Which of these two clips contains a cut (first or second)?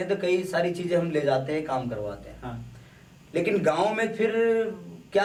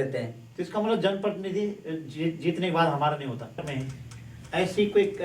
second